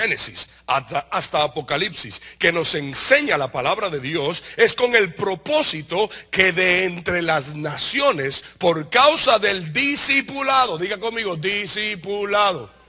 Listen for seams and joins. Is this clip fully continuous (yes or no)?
no